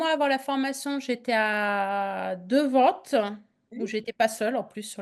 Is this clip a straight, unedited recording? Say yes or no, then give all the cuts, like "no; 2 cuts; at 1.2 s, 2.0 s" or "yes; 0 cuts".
yes; 0 cuts